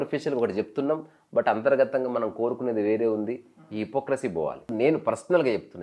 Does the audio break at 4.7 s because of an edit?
yes; 1 cut; at 4.7 s

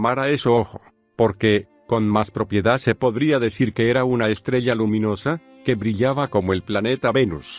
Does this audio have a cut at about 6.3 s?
yes; 1 cut; at 6.3 s

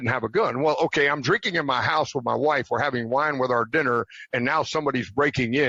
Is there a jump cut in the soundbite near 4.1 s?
no; 0 cuts

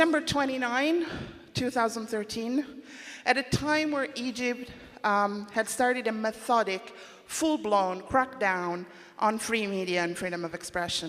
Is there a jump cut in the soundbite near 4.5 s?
yes; 1 cut; at 4.5 s

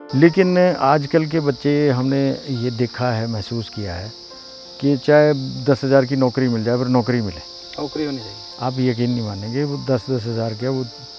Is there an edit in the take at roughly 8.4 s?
yes; 1 cut; at 8.4 s

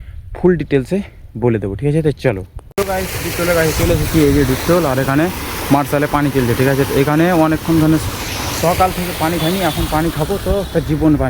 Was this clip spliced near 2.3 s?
no; 0 cuts

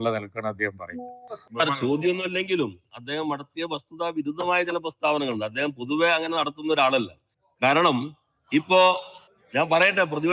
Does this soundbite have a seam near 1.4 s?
yes; 1 cut; at 1.4 s

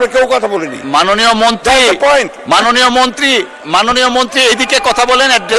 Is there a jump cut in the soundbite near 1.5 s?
no; 0 cuts

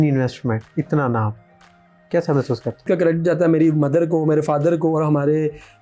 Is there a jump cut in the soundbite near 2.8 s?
yes; 1 cut; at 2.8 s

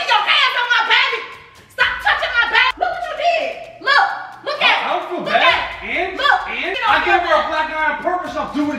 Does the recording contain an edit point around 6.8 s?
yes; 2 cuts; at 2.7 s, 6.8 s

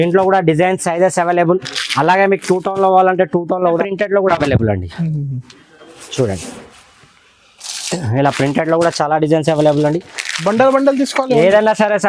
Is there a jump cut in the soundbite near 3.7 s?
yes; 1 cut; at 3.7 s

